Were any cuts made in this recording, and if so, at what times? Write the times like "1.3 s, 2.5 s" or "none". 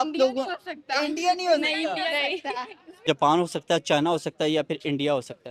3.1 s